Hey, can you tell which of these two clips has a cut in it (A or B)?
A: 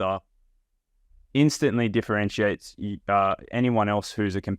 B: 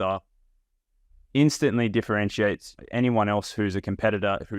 B